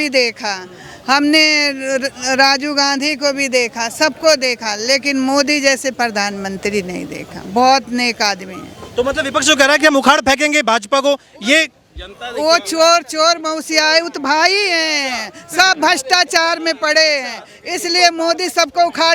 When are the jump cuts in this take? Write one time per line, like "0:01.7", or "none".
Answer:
none